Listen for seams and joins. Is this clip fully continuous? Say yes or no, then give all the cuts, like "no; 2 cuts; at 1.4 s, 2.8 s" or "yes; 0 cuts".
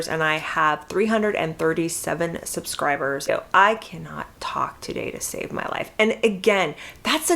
no; 1 cut; at 3.3 s